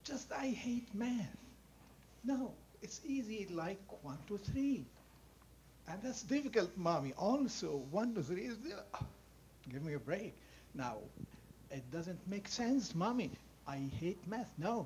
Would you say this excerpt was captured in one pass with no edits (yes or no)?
yes